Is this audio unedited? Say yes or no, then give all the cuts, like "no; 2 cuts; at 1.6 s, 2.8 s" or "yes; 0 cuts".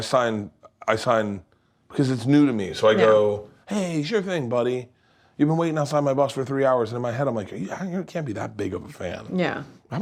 yes; 0 cuts